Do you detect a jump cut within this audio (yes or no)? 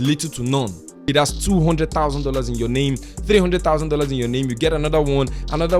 yes